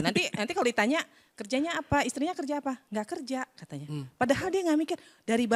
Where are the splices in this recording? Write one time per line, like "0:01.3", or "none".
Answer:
none